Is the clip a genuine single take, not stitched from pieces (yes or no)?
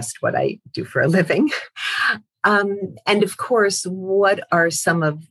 yes